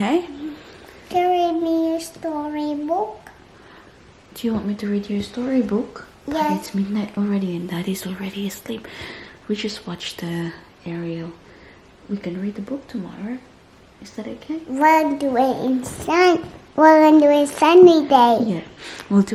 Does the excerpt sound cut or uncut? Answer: uncut